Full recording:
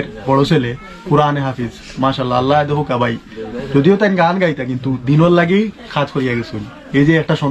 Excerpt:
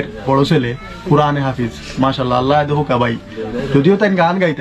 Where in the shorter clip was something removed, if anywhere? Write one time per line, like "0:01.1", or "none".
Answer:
none